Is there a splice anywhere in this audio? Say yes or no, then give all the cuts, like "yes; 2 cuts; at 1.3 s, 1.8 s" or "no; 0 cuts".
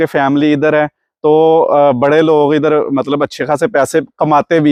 no; 0 cuts